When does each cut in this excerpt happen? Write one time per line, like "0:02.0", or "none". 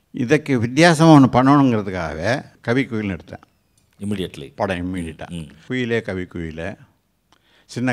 0:02.5
0:05.6